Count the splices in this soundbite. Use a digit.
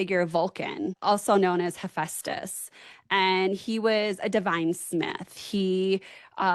1